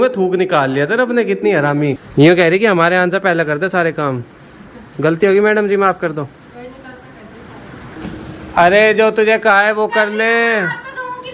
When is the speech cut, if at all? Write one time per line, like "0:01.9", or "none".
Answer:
0:02.0
0:08.0